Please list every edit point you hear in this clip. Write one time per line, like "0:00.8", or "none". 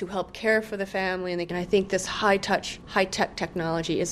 0:01.5
0:02.8